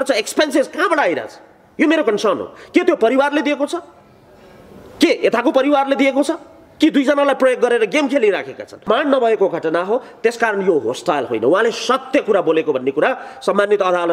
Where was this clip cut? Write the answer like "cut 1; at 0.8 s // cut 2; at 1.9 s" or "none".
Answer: cut 1; at 8.9 s